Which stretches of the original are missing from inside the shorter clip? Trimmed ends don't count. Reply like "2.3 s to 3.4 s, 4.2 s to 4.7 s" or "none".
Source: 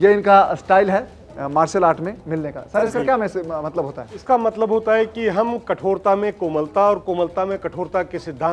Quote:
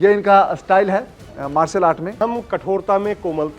2.2 s to 5.3 s